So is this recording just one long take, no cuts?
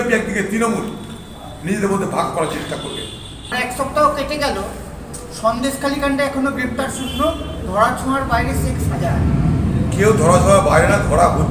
no; 1 cut; at 3.3 s

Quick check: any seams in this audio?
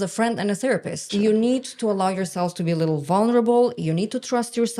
no; 0 cuts

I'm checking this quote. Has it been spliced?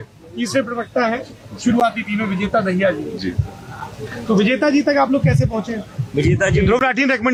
no; 0 cuts

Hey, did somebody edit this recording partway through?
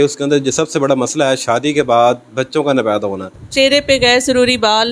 yes; 1 cut; at 3.4 s

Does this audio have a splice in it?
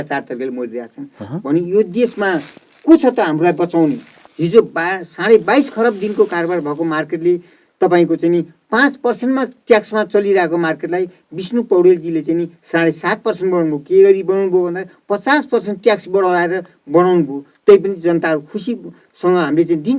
yes; 1 cut; at 4.2 s

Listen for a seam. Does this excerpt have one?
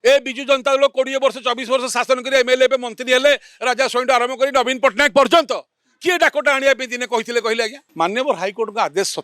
yes; 1 cut; at 7.8 s

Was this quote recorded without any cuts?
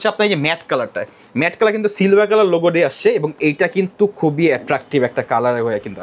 yes; 0 cuts

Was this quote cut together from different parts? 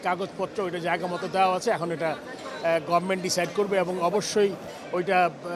no; 0 cuts

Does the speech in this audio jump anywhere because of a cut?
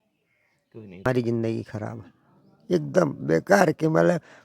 yes; 1 cut; at 1.1 s

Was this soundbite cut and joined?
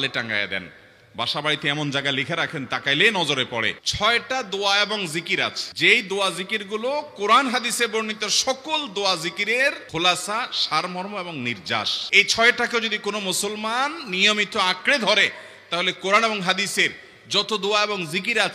yes; 1 cut; at 3.8 s

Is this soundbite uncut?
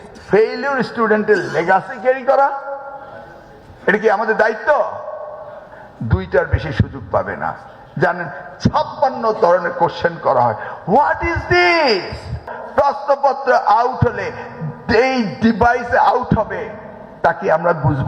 no; 1 cut; at 12.6 s

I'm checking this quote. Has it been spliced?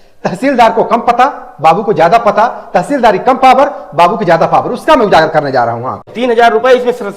yes; 1 cut; at 6.1 s

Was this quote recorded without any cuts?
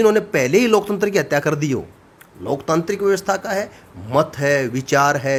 yes; 0 cuts

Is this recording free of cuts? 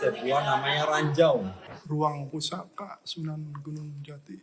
no; 1 cut; at 1.7 s

